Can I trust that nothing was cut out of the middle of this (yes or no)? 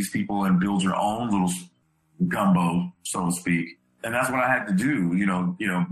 no